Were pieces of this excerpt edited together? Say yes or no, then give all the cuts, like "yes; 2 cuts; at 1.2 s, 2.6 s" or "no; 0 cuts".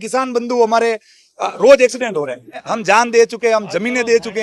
yes; 1 cut; at 2.6 s